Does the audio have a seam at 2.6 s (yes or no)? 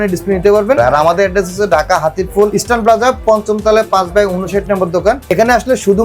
yes